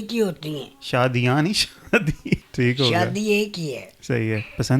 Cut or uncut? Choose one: cut